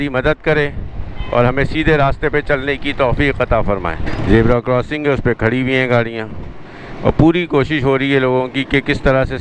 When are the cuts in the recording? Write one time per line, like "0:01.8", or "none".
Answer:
0:04.1